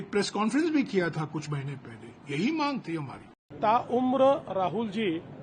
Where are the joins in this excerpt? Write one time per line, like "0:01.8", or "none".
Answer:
0:03.5